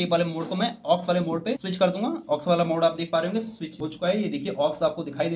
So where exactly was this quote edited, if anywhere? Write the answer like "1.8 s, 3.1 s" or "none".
none